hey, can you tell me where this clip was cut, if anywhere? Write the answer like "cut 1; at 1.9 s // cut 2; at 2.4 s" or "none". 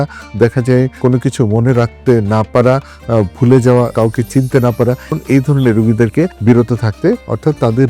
cut 1; at 5.1 s // cut 2; at 6.4 s